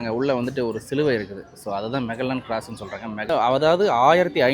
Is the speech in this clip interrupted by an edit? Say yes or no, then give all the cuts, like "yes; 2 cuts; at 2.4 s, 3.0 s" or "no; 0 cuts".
yes; 1 cut; at 3.3 s